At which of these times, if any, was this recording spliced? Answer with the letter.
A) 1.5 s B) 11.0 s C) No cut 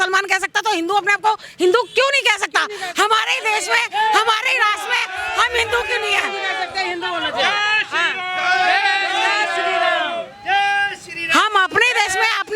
C